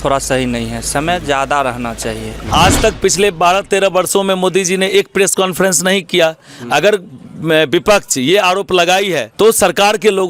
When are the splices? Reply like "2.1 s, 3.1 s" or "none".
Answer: 2.3 s, 9.2 s